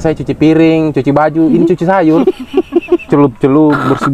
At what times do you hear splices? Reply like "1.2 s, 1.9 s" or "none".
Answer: none